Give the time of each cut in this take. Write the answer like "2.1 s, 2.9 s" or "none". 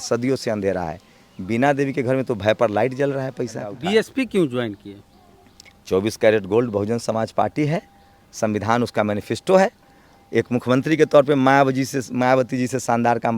3.8 s